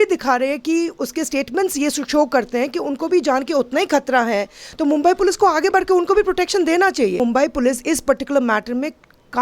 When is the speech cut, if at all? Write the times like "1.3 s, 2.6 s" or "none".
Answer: 7.2 s

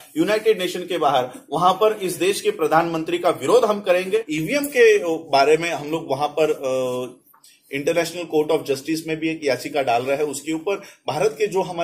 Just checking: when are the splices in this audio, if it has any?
4.3 s

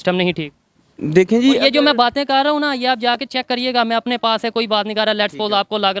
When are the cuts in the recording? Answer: none

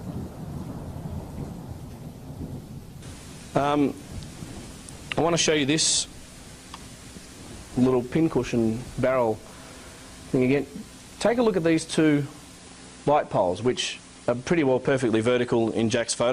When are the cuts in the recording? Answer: none

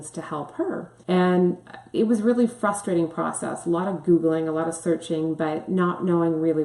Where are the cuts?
0.9 s

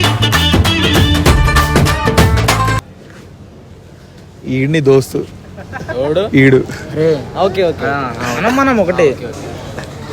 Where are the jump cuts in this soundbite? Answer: none

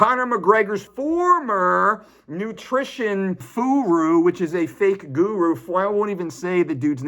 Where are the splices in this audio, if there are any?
0.9 s, 3.5 s

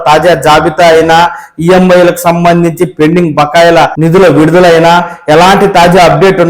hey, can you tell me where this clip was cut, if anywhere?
3.9 s

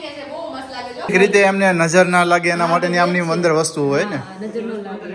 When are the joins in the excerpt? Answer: 1.1 s

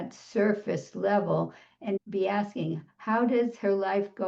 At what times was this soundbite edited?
2.0 s

